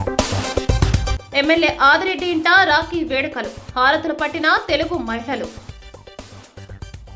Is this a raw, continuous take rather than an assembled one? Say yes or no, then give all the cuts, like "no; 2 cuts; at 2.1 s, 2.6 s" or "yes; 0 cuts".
yes; 0 cuts